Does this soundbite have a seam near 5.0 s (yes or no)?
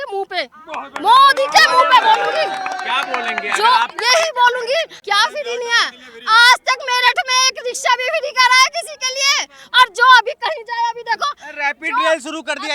yes